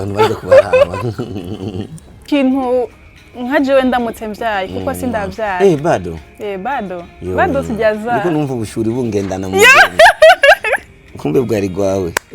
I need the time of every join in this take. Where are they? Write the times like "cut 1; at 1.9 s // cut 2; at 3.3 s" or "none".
cut 1; at 2.3 s